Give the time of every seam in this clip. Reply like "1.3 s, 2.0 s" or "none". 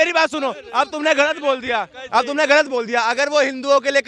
none